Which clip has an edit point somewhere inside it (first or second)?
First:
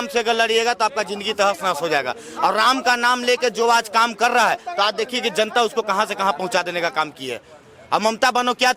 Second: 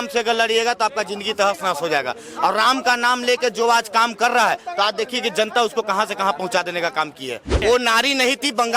second